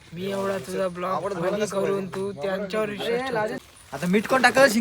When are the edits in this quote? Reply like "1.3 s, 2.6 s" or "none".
3.6 s